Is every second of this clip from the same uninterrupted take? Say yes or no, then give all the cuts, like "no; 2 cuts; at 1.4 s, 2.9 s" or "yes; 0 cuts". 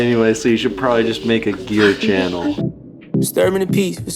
no; 1 cut; at 3.0 s